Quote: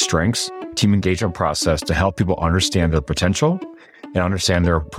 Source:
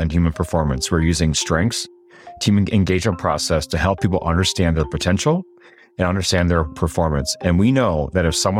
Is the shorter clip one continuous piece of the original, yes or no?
no